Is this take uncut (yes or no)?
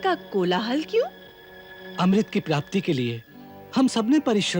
yes